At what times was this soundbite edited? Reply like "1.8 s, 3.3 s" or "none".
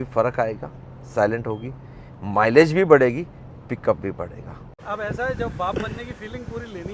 4.8 s